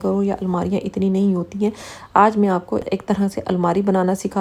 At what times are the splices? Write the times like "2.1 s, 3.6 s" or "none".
2.8 s